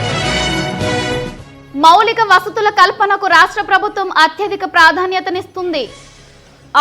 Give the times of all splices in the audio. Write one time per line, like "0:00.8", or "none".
0:01.2